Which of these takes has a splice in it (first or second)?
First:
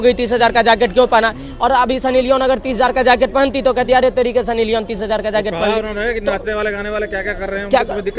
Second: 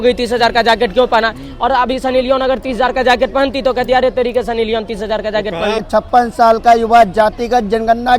second